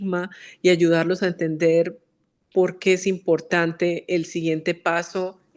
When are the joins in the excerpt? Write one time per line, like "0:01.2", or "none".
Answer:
none